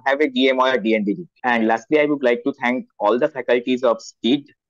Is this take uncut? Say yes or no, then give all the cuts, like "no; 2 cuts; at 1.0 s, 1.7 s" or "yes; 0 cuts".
no; 1 cut; at 1.3 s